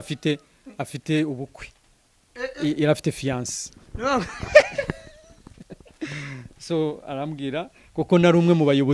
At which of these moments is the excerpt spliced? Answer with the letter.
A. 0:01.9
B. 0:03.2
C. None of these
C